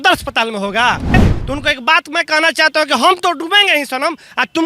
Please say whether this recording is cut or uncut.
cut